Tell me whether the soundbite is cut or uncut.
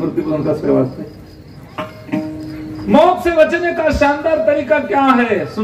uncut